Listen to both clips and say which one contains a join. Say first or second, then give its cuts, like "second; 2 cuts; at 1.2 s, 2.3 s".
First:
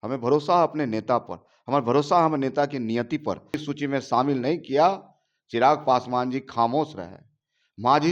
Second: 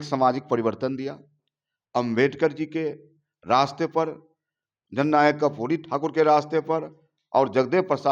first; 1 cut; at 3.6 s